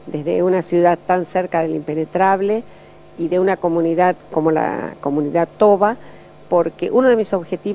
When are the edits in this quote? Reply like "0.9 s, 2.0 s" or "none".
6.7 s